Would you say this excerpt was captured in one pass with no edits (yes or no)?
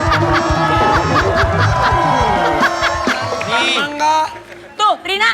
no